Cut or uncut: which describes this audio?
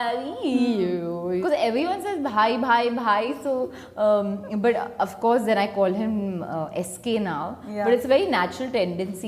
cut